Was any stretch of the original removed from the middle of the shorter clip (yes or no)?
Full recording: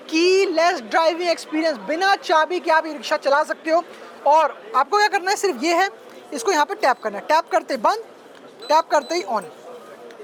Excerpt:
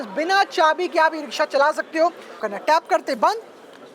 yes